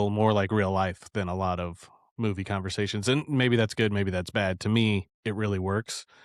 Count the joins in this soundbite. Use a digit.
0